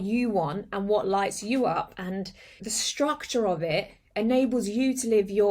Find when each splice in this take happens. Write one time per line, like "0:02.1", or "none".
0:02.6